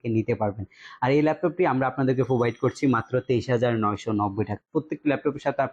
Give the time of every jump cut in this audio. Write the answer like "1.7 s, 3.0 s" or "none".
4.7 s